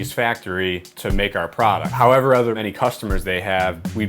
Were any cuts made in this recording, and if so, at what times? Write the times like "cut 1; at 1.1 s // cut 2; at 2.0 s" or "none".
cut 1; at 1.9 s // cut 2; at 2.6 s